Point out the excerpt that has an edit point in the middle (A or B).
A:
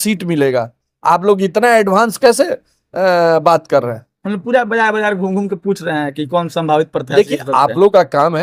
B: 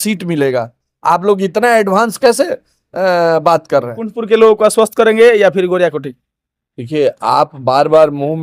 B